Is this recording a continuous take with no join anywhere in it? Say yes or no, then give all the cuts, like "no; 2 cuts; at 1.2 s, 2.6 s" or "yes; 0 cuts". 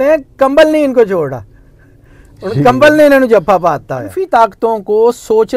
no; 1 cut; at 4.1 s